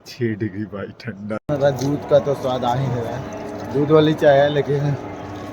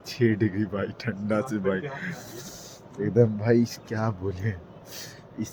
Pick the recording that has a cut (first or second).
first